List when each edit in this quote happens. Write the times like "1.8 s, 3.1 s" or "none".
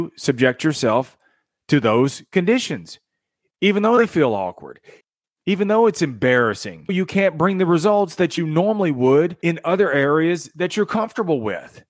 5.0 s, 6.9 s, 9.4 s